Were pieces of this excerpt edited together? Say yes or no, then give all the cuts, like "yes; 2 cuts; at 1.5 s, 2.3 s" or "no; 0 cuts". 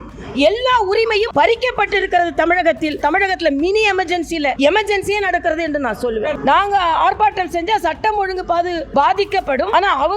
yes; 5 cuts; at 1.3 s, 3.0 s, 4.6 s, 6.3 s, 8.8 s